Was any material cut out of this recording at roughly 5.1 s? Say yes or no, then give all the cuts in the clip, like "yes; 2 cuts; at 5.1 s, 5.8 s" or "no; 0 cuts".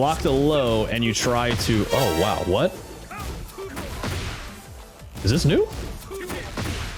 no; 0 cuts